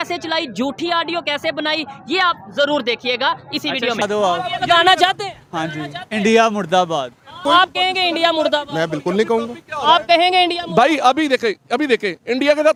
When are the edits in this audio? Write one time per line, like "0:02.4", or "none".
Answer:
none